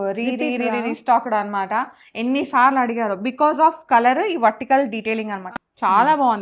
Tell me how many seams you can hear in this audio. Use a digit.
1